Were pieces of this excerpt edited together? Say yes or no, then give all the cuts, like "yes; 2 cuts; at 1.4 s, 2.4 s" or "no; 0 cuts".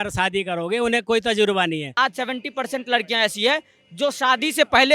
yes; 1 cut; at 1.9 s